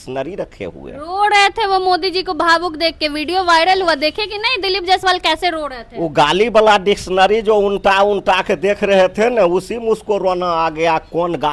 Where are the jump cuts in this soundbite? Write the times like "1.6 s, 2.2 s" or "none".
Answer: none

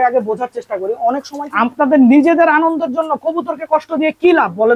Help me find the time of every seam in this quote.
1.4 s

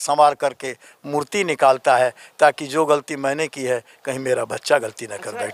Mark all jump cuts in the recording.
none

